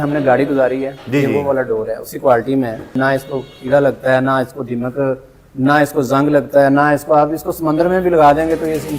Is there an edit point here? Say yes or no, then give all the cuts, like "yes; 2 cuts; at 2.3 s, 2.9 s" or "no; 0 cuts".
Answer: yes; 1 cut; at 3.0 s